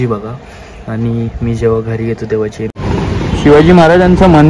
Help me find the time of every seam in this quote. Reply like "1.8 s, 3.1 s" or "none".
2.7 s